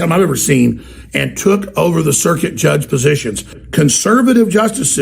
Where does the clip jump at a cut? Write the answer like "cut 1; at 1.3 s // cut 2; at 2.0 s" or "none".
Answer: cut 1; at 3.6 s